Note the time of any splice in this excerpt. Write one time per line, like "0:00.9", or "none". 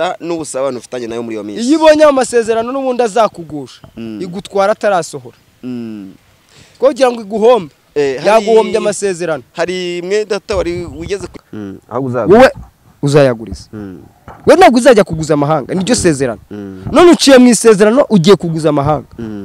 0:11.3